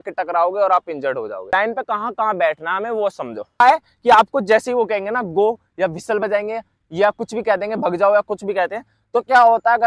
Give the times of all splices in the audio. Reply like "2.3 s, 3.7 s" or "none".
1.5 s, 3.6 s